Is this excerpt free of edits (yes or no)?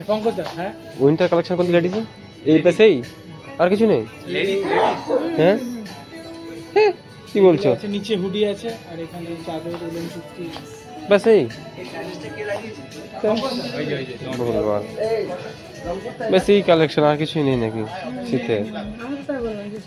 yes